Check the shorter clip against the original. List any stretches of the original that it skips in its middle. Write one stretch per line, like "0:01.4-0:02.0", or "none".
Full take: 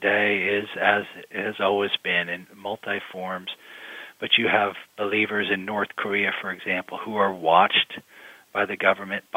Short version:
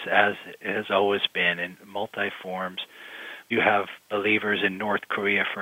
0:04.1-0:04.3